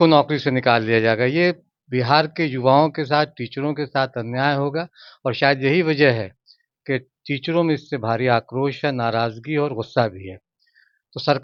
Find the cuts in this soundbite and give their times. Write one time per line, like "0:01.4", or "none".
none